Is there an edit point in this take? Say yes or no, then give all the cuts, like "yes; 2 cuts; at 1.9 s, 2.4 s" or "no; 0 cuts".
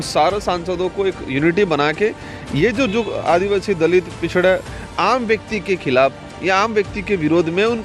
no; 0 cuts